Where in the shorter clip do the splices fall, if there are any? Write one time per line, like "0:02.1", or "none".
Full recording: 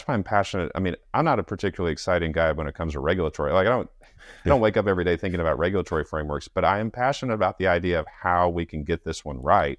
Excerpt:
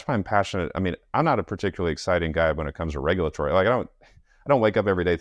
none